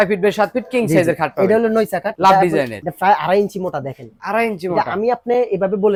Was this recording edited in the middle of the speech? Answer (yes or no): no